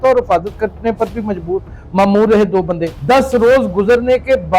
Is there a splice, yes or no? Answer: yes